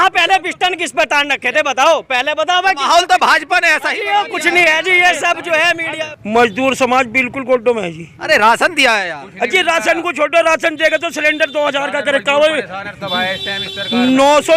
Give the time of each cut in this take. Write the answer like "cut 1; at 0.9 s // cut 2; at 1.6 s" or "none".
cut 1; at 6.1 s